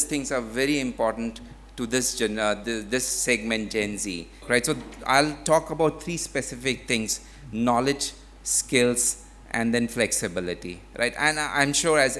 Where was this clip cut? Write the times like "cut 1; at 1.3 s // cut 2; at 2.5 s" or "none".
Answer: cut 1; at 4.4 s